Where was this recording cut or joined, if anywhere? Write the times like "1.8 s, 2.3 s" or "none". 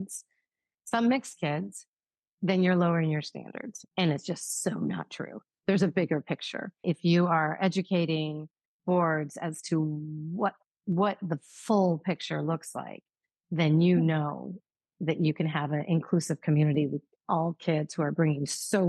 6.8 s